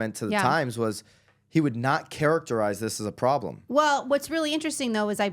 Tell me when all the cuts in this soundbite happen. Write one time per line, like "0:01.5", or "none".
0:03.6